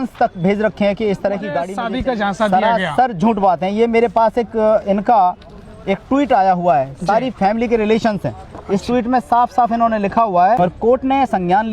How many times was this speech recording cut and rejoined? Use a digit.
2